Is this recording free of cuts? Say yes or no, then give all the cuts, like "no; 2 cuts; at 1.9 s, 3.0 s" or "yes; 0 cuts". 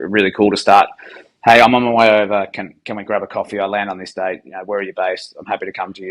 yes; 0 cuts